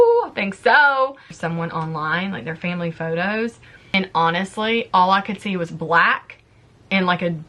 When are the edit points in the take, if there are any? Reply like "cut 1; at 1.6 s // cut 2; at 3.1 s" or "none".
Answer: cut 1; at 1.4 s // cut 2; at 3.9 s